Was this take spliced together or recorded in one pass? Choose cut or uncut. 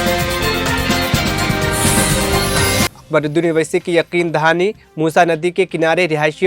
cut